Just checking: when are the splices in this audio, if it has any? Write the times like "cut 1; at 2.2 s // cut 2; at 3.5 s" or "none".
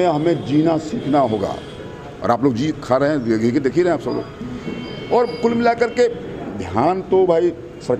none